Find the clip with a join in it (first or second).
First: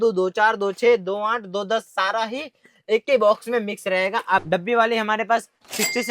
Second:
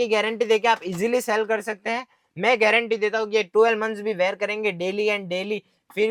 first